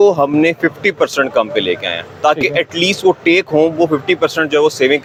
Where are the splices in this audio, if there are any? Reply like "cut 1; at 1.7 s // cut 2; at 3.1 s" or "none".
none